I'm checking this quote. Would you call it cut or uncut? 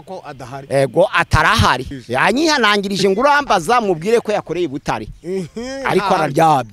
cut